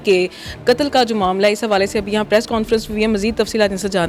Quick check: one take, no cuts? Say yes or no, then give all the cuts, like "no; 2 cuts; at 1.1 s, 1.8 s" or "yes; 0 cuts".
yes; 0 cuts